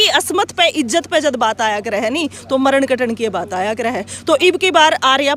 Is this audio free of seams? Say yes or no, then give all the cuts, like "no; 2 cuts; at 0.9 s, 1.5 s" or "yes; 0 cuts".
yes; 0 cuts